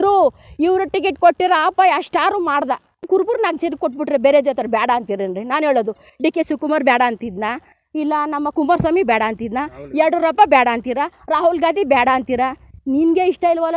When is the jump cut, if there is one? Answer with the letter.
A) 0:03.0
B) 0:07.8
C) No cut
A